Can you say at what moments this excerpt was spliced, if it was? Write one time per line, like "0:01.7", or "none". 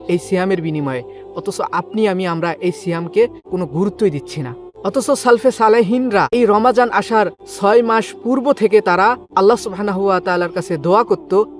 0:03.4
0:04.6
0:06.4
0:07.4
0:09.2